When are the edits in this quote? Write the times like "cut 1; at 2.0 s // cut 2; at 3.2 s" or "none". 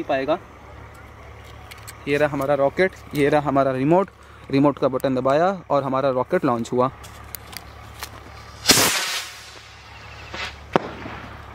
cut 1; at 6.9 s